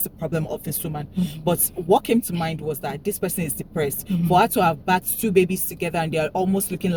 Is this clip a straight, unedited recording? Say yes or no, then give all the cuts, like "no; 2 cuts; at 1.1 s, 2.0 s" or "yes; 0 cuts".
yes; 0 cuts